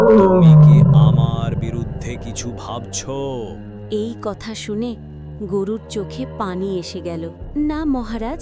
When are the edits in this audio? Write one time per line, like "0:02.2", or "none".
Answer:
none